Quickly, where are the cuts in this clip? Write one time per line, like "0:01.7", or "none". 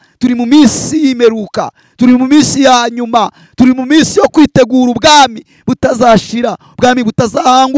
none